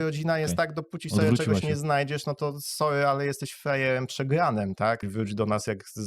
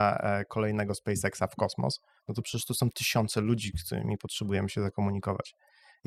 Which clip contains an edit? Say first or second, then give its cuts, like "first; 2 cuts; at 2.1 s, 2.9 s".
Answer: first; 1 cut; at 5.1 s